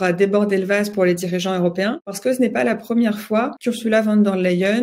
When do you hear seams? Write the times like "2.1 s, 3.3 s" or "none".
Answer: 3.6 s